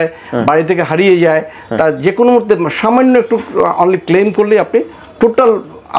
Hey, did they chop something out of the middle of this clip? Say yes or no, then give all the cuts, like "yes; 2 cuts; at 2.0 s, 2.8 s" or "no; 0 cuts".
no; 0 cuts